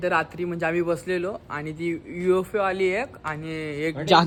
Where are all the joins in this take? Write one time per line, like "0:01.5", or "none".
none